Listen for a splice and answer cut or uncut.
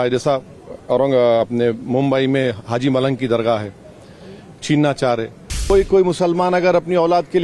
cut